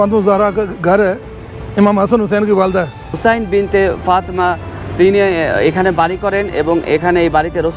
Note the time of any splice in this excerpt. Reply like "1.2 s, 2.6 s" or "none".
3.1 s